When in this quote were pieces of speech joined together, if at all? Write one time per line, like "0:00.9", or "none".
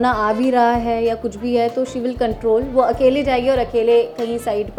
none